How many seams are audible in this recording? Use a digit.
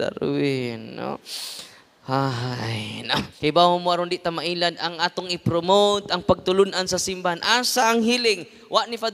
1